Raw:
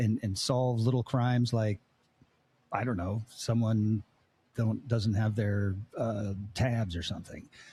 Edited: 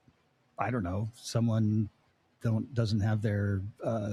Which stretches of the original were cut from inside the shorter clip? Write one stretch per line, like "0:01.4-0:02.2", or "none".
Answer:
none